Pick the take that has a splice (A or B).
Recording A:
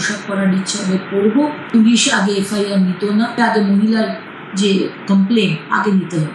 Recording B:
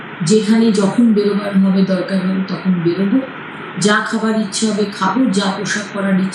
A